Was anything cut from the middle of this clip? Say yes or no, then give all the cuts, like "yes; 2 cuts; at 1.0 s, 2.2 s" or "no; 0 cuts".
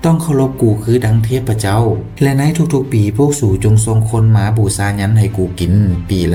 no; 0 cuts